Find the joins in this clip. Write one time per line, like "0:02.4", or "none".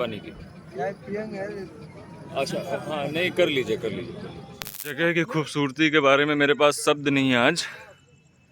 0:04.9